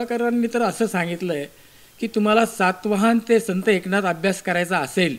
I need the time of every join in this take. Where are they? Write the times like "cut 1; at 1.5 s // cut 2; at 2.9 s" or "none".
none